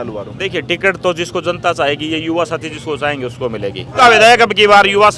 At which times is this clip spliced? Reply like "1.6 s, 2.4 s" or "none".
4.0 s